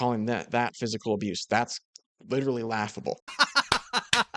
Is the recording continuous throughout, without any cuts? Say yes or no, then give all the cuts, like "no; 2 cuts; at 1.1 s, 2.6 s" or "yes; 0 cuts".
no; 1 cut; at 3.3 s